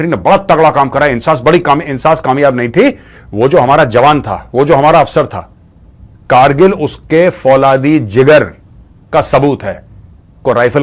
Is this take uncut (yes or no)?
yes